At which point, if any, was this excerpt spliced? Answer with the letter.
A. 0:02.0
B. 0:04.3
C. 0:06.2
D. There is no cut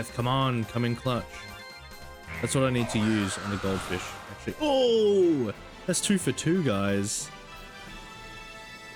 D